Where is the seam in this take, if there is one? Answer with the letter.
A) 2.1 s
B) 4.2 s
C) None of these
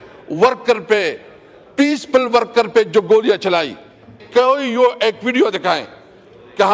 B